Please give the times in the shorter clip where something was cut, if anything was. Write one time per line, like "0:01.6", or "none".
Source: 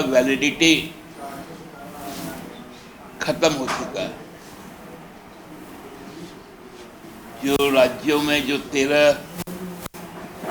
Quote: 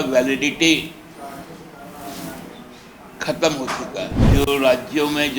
0:04.2